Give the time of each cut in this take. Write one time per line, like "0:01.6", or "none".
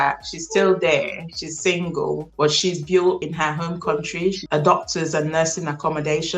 0:04.4